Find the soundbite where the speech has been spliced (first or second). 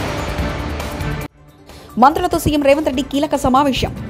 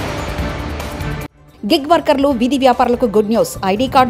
first